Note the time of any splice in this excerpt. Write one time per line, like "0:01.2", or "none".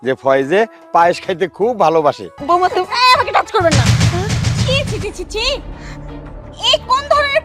0:02.3